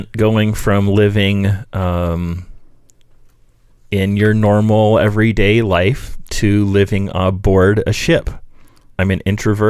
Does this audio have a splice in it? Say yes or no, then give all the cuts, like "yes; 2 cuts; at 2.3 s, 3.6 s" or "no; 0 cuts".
no; 0 cuts